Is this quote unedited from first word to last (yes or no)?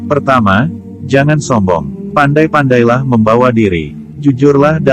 yes